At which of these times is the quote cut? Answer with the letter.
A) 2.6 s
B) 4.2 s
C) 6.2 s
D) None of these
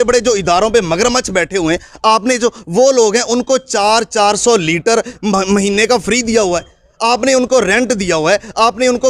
D